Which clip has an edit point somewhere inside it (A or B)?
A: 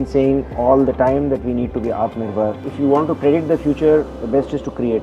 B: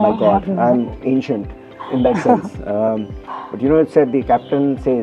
A